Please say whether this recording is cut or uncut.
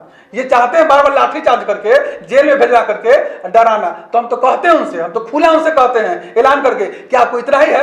uncut